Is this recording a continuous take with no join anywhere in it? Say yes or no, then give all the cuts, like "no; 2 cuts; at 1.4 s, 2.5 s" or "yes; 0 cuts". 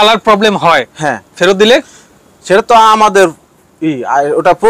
yes; 0 cuts